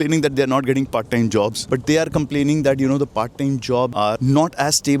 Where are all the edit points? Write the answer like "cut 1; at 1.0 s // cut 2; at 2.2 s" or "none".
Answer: cut 1; at 1.6 s // cut 2; at 4.1 s